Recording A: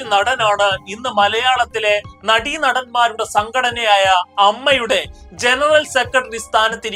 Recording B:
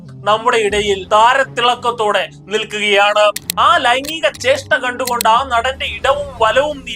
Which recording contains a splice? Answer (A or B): B